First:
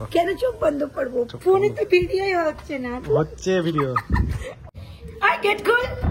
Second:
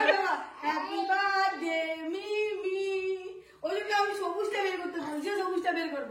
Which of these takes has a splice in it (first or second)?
first